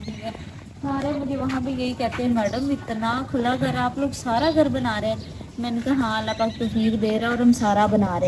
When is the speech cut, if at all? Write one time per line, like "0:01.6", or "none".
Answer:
none